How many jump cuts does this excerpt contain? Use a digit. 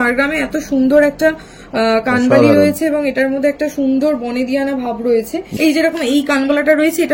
1